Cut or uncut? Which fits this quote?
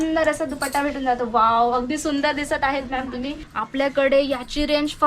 cut